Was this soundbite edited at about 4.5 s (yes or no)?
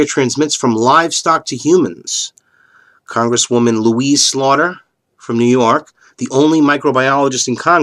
yes